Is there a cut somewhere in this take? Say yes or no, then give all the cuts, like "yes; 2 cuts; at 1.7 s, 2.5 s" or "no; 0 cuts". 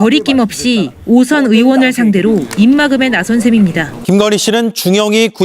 yes; 1 cut; at 3.9 s